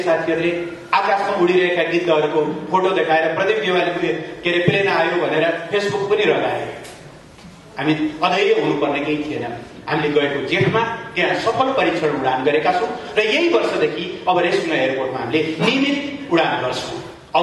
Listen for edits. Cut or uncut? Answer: uncut